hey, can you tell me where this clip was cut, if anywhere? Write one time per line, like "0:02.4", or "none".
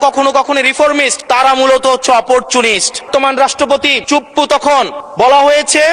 0:01.2
0:03.1
0:04.0
0:05.0